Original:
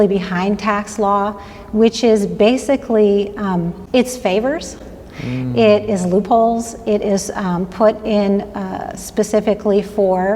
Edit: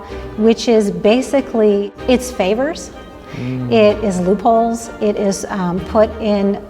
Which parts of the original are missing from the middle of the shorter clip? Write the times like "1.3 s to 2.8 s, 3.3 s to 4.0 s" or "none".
3.3 s to 3.8 s